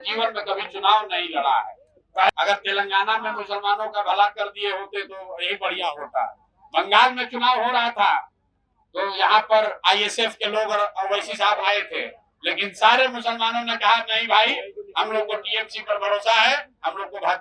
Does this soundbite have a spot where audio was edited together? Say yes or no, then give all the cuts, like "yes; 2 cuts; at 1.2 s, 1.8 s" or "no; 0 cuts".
yes; 1 cut; at 2.3 s